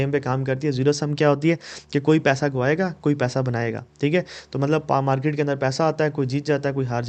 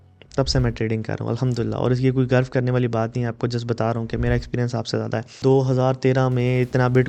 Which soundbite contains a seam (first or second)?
second